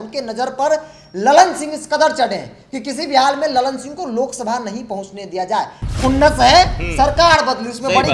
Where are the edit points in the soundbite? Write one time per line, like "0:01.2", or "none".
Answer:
none